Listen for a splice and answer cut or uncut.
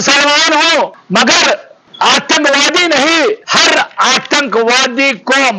cut